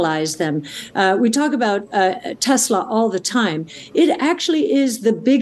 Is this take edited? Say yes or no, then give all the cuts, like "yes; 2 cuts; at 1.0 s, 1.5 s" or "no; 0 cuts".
no; 0 cuts